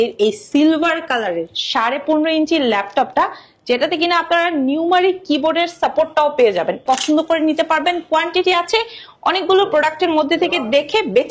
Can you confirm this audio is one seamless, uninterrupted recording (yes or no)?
no